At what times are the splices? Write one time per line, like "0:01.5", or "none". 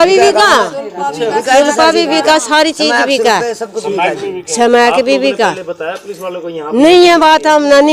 none

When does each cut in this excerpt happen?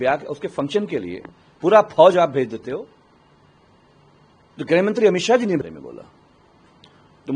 0:05.6

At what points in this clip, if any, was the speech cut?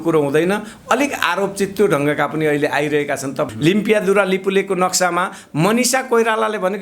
0:03.5

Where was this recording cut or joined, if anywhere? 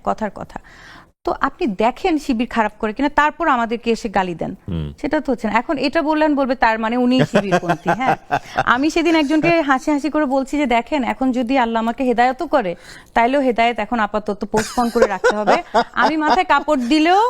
none

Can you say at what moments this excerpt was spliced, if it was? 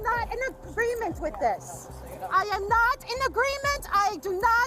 none

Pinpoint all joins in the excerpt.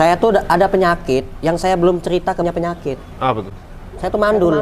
0:02.4

